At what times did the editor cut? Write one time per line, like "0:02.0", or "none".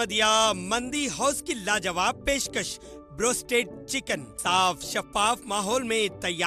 none